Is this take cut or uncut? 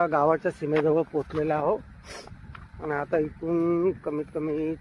uncut